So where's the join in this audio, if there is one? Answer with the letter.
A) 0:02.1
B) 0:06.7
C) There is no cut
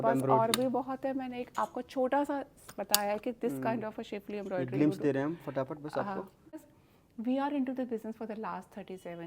B